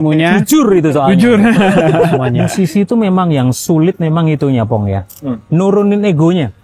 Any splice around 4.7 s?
no; 1 cut; at 2.3 s

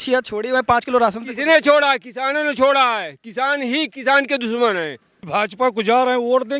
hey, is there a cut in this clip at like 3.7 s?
no; 1 cut; at 5.3 s

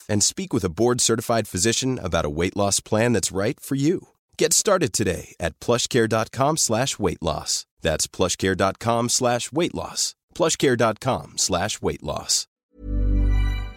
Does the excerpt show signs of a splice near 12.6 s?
yes; 1 cut; at 12.6 s

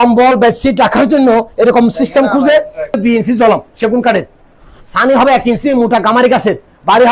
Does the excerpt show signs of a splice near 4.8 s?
no; 1 cut; at 3.0 s

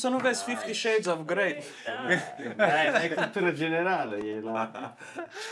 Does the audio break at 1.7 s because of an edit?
no; 0 cuts

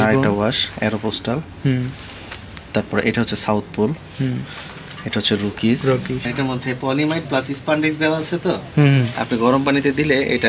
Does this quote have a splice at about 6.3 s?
yes; 1 cut; at 6.3 s

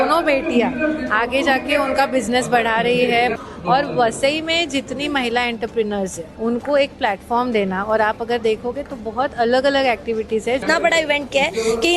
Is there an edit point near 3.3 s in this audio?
yes; 3 cuts; at 3.3 s, 6.2 s, 10.6 s

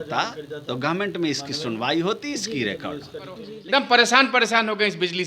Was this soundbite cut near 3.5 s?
yes; 1 cut; at 3.5 s

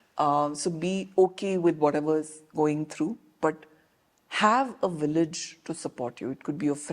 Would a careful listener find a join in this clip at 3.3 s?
no; 0 cuts

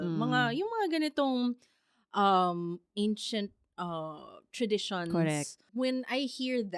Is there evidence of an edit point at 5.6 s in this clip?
yes; 1 cut; at 5.6 s

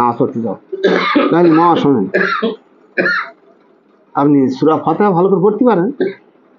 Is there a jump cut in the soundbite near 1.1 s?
no; 0 cuts

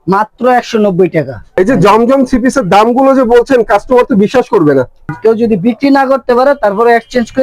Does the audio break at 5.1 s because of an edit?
yes; 2 cuts; at 1.4 s, 5.1 s

